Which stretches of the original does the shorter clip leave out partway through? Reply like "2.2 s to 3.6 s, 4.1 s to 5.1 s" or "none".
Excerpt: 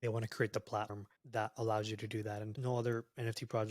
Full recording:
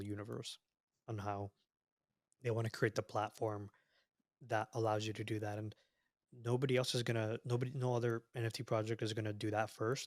3.3 s to 4.1 s, 5.7 s to 7.7 s